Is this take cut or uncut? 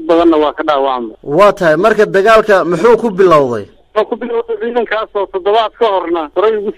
cut